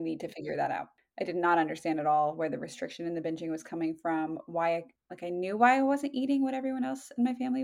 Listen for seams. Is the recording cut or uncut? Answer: cut